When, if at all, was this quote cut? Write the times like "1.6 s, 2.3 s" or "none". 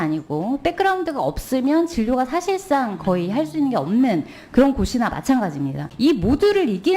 5.8 s